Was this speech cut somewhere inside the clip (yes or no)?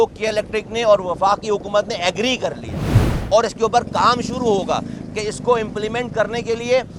no